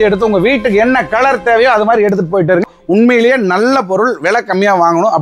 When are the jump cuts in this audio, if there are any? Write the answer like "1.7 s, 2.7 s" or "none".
2.7 s